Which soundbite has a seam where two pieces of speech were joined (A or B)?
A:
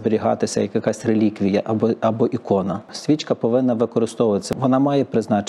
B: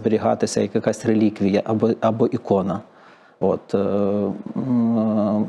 A